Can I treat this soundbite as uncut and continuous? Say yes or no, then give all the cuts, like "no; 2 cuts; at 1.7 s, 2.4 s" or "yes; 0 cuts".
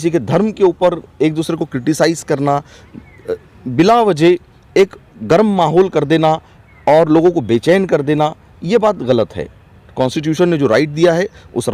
yes; 0 cuts